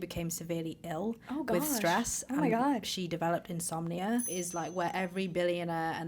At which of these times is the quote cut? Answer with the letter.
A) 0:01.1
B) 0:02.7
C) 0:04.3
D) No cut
C